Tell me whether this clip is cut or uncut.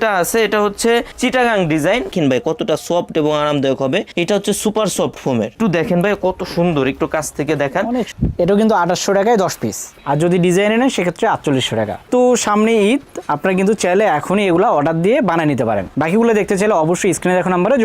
cut